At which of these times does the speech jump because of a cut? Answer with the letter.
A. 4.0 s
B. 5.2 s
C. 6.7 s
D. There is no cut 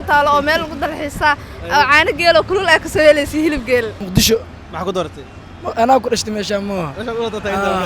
A